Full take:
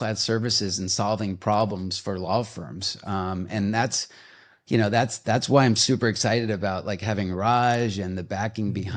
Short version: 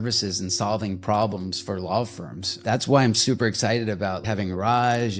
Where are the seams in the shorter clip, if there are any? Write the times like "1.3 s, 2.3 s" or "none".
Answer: 2.6 s, 4.2 s

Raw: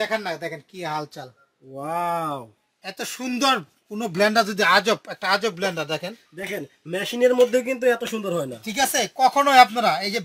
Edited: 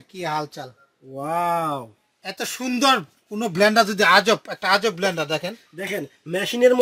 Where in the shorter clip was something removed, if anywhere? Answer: none

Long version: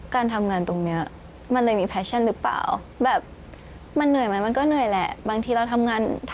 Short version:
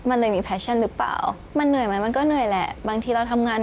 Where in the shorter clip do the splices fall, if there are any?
1.4 s

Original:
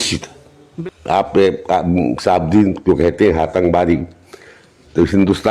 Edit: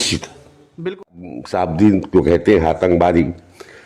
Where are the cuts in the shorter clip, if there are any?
1.1 s

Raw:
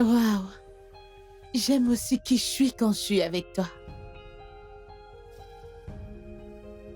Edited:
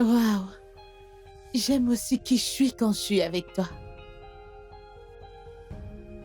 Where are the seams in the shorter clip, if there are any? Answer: 3.7 s

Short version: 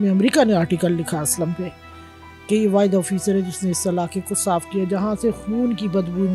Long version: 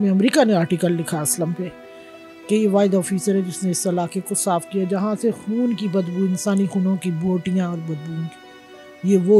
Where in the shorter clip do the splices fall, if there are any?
none

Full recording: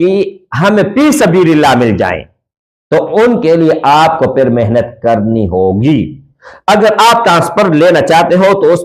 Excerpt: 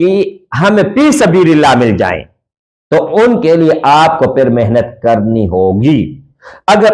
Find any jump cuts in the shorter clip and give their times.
none

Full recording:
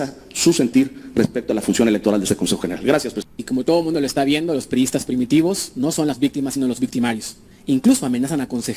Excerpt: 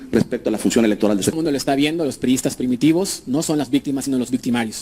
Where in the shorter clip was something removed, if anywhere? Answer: 1.3 s

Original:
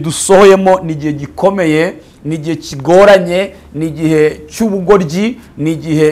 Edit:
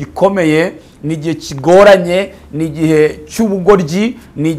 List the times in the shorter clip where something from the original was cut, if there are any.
none

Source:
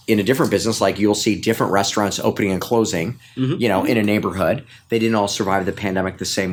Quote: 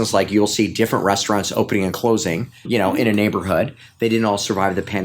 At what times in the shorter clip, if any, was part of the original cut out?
2.6 s

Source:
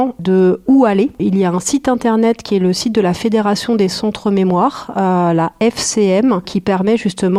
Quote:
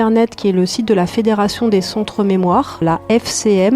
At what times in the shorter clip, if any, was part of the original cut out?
2.8 s

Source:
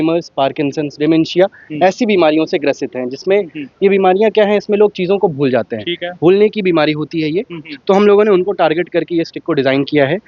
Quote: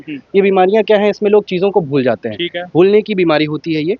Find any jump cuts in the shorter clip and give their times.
none

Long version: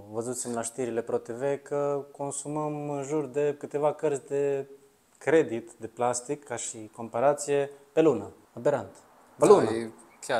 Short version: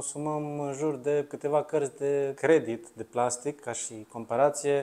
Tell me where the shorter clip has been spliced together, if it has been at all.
2.3 s

